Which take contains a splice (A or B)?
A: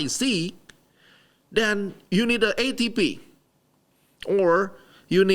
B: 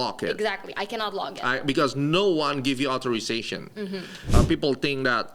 B